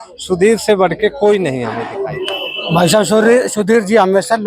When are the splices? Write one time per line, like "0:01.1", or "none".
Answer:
0:01.9